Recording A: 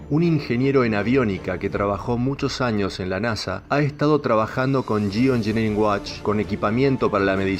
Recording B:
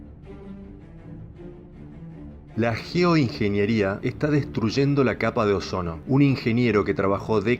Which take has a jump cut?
A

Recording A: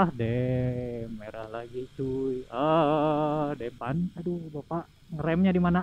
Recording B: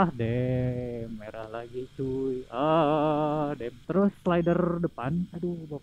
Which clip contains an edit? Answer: A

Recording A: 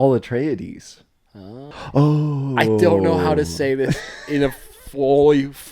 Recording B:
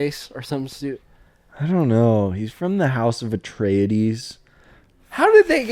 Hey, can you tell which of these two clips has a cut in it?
A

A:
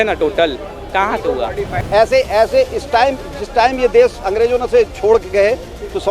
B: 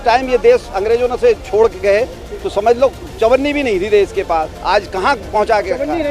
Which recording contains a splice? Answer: A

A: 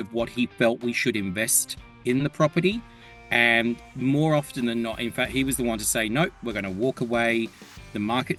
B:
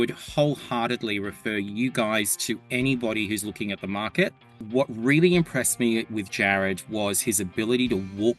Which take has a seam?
B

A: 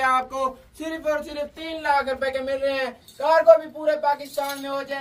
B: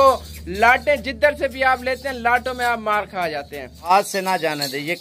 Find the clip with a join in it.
B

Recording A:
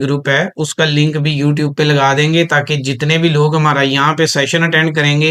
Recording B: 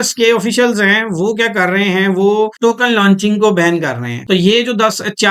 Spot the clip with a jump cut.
B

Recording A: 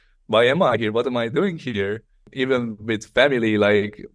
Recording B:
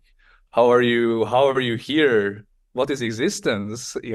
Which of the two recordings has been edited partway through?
A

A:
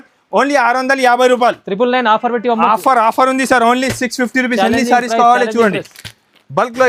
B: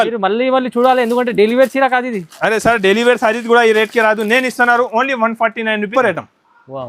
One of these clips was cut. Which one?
B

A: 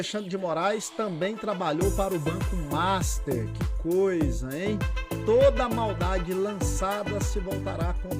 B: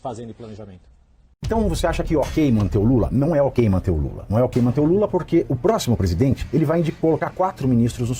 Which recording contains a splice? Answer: B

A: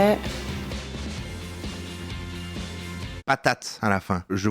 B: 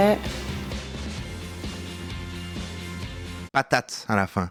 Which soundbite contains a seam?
A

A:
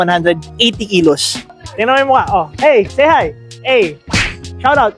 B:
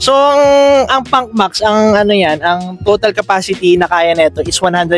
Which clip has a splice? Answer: A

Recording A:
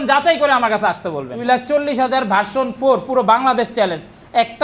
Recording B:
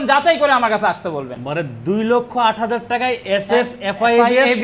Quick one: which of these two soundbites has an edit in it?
A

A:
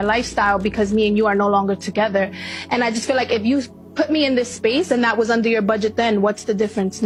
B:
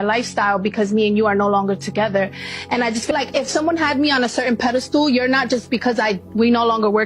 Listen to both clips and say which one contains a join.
B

